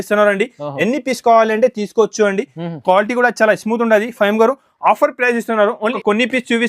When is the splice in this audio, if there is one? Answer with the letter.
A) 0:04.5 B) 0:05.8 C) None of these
B